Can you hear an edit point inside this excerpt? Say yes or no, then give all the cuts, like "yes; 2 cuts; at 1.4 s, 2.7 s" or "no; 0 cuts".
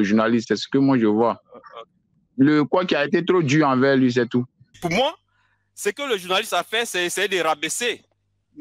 yes; 2 cuts; at 2.1 s, 4.8 s